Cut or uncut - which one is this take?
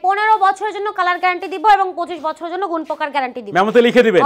uncut